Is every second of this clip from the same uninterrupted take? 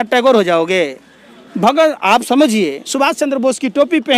yes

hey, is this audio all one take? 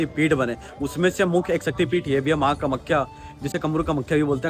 yes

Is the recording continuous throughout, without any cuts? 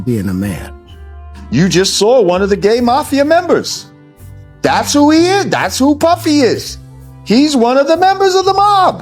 no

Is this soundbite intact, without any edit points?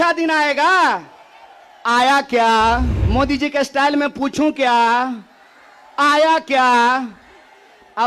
no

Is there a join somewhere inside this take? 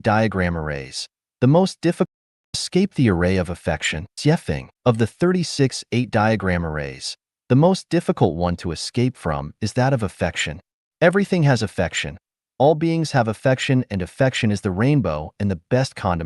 yes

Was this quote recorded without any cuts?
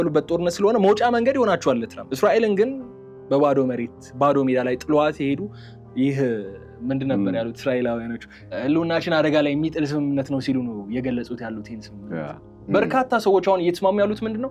no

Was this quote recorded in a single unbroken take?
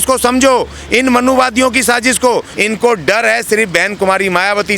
no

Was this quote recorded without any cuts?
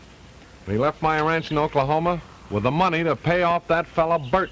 yes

